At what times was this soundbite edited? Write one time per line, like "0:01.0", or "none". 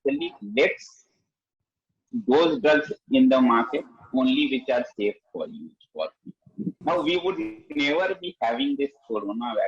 0:06.8